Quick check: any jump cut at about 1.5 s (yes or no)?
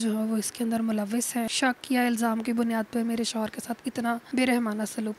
yes